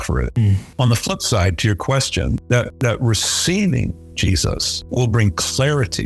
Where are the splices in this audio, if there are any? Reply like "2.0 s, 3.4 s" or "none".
4.9 s

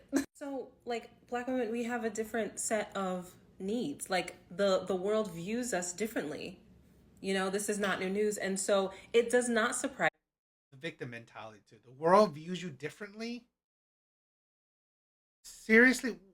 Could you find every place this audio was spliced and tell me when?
none

